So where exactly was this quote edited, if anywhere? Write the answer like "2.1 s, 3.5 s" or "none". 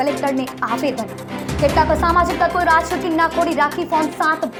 none